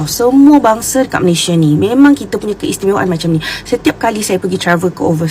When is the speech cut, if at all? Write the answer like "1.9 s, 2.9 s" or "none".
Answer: none